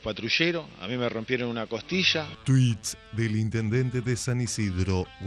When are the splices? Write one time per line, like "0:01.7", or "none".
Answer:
0:02.2